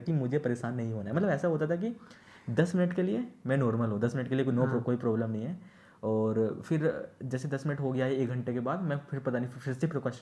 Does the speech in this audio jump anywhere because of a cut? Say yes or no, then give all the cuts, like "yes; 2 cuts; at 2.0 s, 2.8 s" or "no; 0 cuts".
no; 0 cuts